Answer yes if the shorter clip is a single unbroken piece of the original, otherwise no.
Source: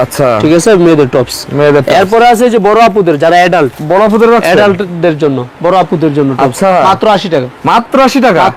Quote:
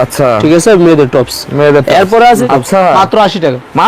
no